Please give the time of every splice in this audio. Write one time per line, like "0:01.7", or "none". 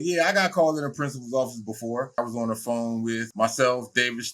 0:02.2
0:03.3